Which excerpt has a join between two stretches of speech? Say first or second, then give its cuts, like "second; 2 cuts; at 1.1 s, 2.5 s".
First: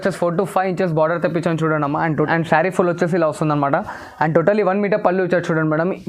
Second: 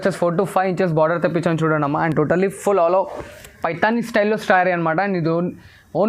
first; 1 cut; at 2.2 s